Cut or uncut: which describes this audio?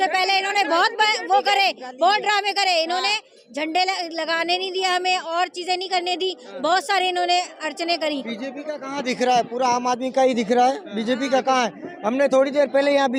uncut